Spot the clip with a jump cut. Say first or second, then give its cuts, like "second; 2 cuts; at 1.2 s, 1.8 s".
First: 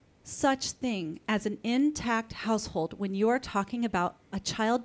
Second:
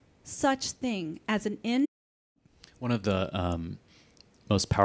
first; 1 cut; at 1.8 s